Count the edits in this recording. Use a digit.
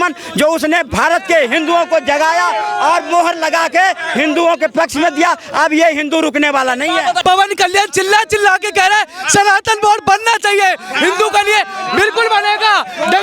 1